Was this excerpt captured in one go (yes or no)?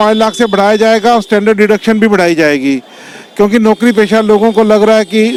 yes